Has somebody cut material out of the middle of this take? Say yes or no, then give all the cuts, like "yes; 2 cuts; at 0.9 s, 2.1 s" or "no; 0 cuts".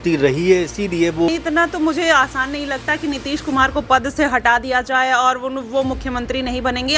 yes; 1 cut; at 1.3 s